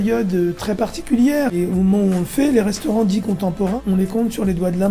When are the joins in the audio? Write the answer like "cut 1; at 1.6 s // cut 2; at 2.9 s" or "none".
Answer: cut 1; at 1.5 s // cut 2; at 3.8 s